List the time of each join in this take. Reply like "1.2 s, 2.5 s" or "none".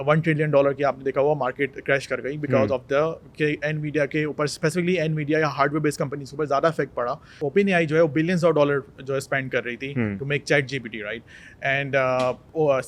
7.3 s